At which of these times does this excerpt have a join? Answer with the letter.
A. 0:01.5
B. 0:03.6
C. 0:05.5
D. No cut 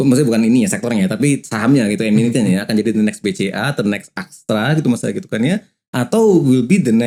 D